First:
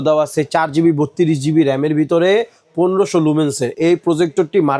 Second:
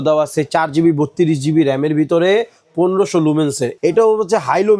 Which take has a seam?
second; 1 cut; at 3.7 s

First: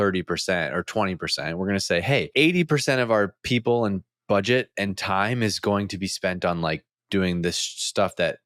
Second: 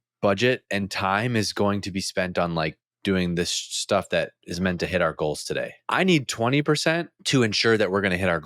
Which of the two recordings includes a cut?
second; 2 cuts; at 5.8 s, 7.1 s

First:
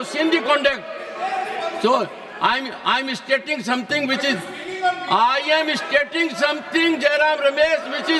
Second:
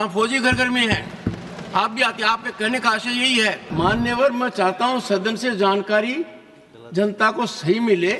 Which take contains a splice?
second; 1 cut; at 3.6 s

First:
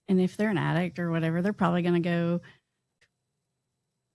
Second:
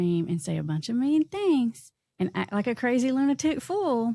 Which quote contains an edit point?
first; 1 cut; at 3.0 s

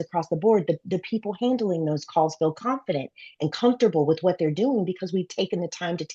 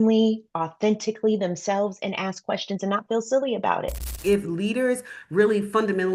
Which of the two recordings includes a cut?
second; 1 cut; at 4.2 s

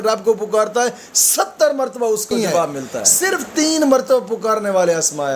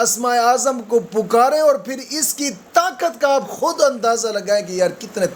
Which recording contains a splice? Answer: first; 1 cut; at 3.1 s

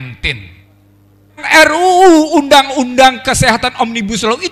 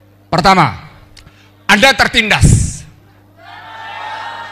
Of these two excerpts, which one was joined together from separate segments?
first; 1 cut; at 1.4 s

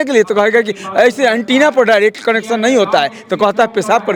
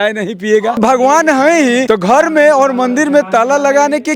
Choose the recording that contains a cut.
second; 2 cuts; at 0.8 s, 1.8 s

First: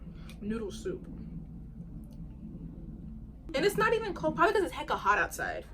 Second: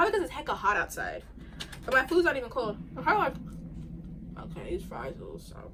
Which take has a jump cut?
first; 1 cut; at 3.5 s

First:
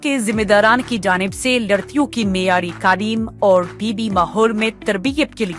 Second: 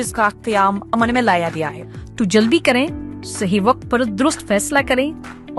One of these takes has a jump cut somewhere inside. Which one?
second; 1 cut; at 1.8 s

